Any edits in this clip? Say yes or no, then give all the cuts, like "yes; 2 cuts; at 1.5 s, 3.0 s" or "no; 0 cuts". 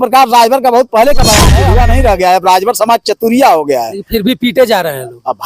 yes; 1 cut; at 1.6 s